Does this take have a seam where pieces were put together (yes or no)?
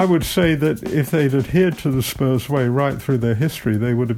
no